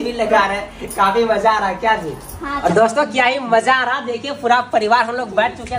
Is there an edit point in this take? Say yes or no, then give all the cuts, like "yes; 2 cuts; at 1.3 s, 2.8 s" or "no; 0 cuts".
yes; 1 cut; at 2.6 s